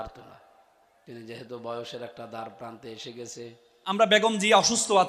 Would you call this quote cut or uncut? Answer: cut